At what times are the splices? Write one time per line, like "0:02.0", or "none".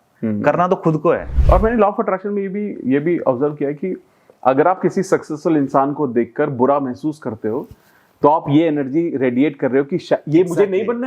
0:01.3

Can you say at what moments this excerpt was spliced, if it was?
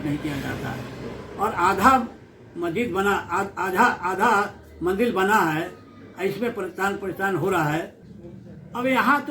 0:08.1

